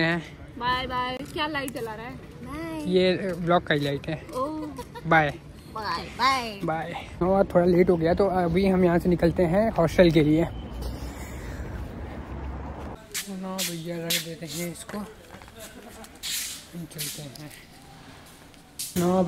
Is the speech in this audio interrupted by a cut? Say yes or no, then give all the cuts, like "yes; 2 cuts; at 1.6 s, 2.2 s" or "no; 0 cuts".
no; 0 cuts